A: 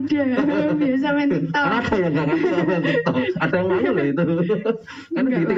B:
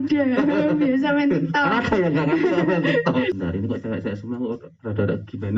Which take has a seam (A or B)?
B